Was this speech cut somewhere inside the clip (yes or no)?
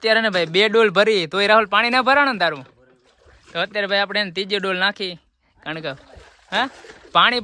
no